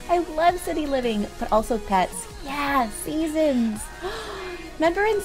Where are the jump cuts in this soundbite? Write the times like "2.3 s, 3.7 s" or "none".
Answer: 3.4 s